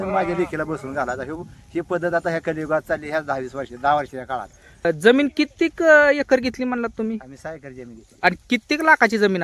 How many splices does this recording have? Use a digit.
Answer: 1